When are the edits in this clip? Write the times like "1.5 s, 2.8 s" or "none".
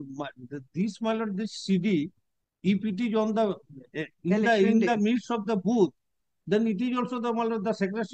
none